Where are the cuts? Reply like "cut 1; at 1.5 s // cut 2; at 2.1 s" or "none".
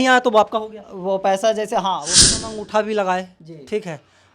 cut 1; at 2.2 s